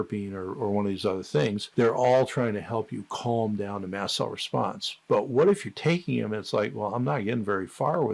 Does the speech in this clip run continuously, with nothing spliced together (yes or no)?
yes